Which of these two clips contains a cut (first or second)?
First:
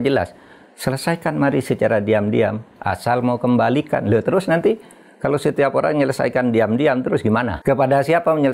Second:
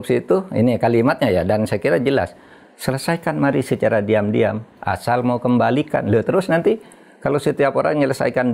first